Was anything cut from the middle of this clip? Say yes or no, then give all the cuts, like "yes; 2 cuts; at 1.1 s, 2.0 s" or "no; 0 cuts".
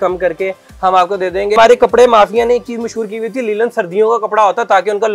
yes; 1 cut; at 1.6 s